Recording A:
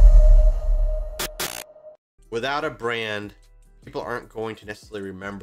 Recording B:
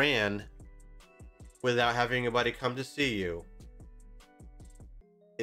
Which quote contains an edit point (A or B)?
A